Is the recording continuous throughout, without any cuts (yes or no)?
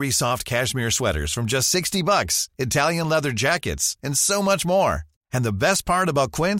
yes